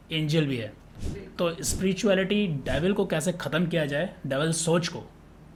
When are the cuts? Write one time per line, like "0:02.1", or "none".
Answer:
none